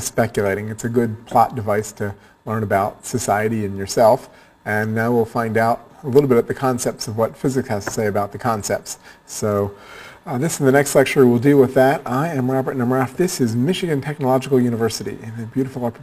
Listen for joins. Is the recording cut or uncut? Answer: cut